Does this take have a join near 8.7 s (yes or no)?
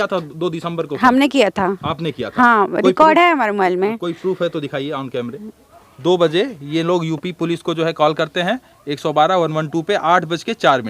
no